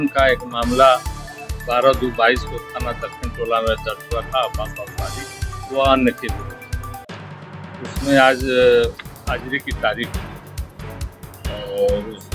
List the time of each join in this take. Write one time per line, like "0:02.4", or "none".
none